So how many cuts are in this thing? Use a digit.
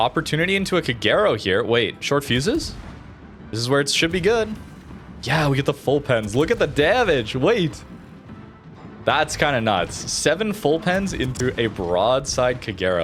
0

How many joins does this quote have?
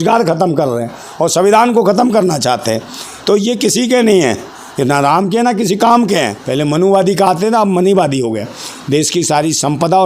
1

